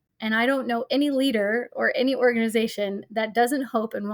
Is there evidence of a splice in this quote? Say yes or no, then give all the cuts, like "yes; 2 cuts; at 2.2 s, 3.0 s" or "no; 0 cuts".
no; 0 cuts